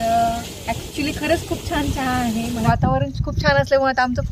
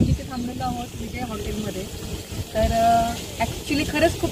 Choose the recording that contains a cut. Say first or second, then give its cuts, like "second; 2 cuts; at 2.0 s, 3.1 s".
first; 1 cut; at 2.6 s